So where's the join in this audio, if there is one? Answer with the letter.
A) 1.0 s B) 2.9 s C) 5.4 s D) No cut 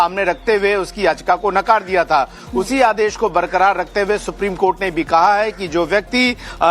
B